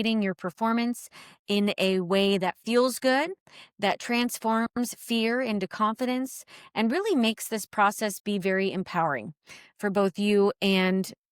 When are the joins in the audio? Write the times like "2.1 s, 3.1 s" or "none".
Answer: none

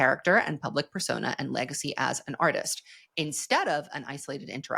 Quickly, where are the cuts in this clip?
none

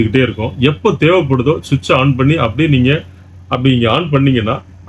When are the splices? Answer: none

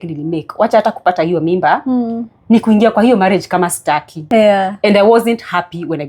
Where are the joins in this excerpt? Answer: 4.2 s

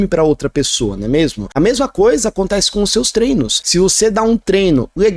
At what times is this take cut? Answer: 1.4 s, 3.6 s

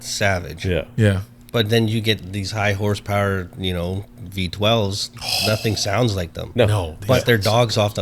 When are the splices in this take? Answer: none

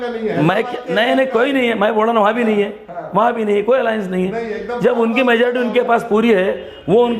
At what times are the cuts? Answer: none

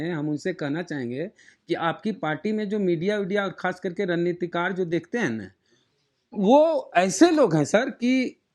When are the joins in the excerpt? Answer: none

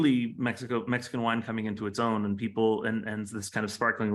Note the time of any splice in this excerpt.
none

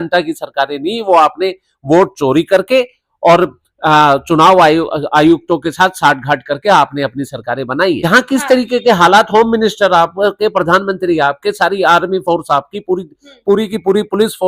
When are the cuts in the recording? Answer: 8.0 s

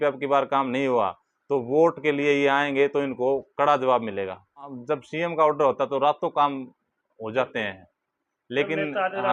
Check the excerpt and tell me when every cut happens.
4.7 s

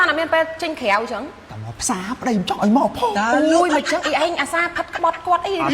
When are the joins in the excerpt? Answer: none

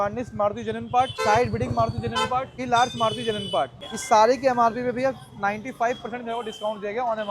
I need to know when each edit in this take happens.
1.2 s, 2.6 s, 3.8 s

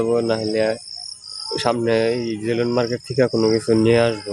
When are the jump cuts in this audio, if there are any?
none

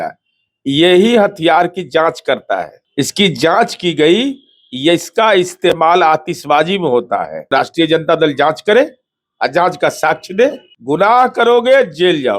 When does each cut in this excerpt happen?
2.8 s, 7.5 s, 10.7 s

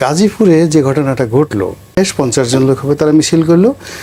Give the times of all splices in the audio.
2.0 s

